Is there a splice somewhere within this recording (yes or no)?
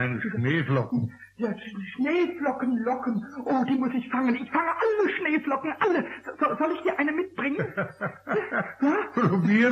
yes